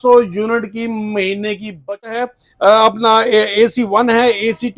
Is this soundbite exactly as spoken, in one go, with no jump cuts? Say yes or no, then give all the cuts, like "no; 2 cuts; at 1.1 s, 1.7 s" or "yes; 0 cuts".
no; 1 cut; at 2.2 s